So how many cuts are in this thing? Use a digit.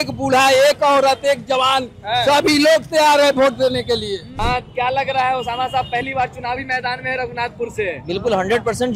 1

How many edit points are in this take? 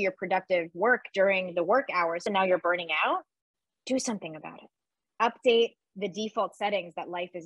2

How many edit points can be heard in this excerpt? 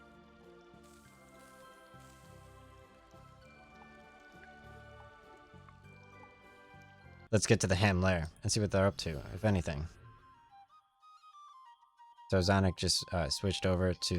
1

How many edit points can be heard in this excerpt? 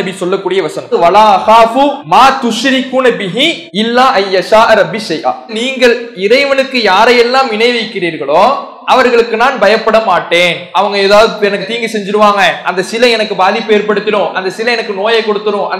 3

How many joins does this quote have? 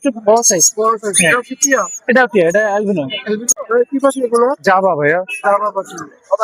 1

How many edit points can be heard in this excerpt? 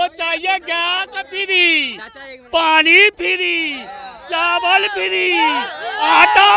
0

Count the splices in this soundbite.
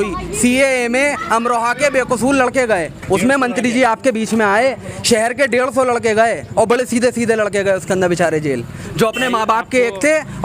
0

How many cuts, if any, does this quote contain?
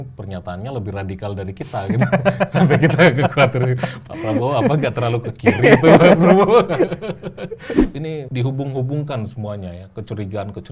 1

